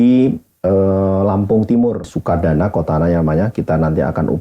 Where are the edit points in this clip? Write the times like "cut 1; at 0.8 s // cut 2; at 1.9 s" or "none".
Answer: cut 1; at 2.1 s